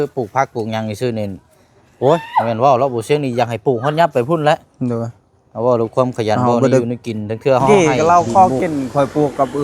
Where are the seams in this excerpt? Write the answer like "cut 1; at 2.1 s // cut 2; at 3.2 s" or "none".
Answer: cut 1; at 7.7 s